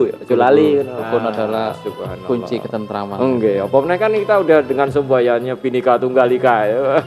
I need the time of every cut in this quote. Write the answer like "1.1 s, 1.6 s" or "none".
1.0 s